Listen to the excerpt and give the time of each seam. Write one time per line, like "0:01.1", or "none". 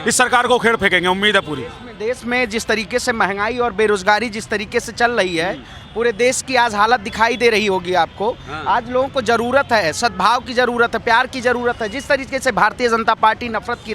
0:01.9